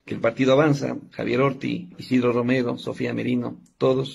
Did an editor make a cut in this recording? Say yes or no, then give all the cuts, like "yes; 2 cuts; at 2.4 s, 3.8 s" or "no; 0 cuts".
yes; 1 cut; at 1.9 s